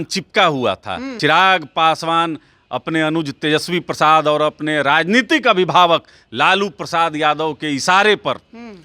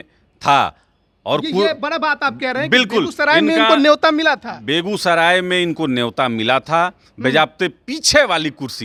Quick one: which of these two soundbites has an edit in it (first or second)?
first